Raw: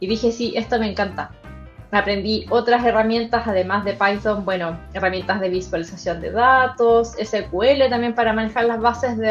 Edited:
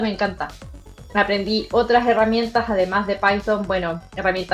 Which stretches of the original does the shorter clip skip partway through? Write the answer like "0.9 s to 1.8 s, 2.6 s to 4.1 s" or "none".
none